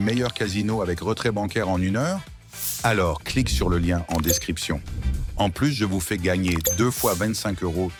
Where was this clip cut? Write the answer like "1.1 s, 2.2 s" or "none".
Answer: none